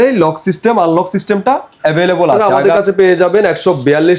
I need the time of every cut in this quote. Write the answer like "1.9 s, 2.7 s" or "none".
2.5 s